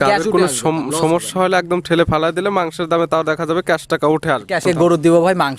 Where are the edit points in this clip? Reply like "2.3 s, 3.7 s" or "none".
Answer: 4.6 s